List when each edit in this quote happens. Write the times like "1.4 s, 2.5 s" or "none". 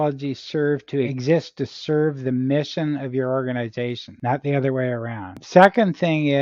1.2 s, 4.1 s, 5.4 s